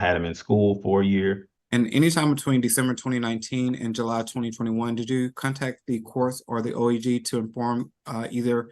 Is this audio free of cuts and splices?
no; 1 cut; at 1.5 s

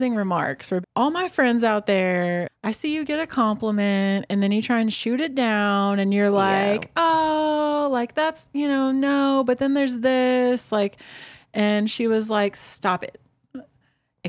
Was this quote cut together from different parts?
yes; 2 cuts; at 0.8 s, 2.5 s

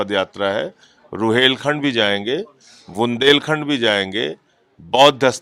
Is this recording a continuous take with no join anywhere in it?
yes; 0 cuts

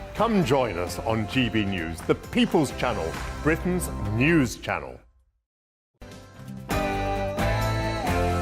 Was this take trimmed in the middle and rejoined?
yes; 1 cut; at 6.0 s

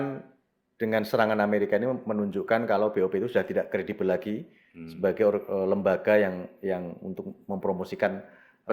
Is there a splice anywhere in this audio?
no; 0 cuts

